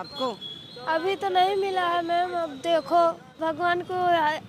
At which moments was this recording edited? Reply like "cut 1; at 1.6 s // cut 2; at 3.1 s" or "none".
cut 1; at 3.4 s